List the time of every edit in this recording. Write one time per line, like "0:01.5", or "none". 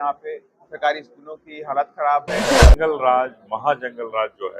0:02.5